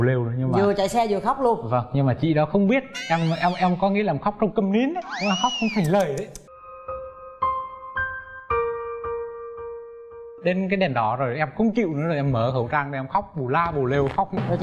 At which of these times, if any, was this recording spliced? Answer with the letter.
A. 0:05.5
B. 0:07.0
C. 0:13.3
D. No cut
D